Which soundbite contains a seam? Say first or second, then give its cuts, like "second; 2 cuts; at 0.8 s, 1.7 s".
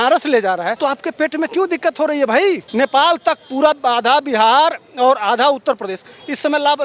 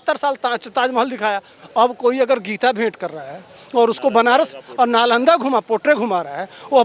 first; 2 cuts; at 0.8 s, 2.6 s